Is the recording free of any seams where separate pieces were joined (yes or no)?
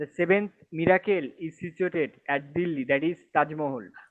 yes